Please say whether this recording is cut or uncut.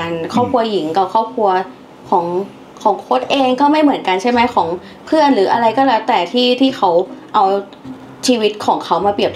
uncut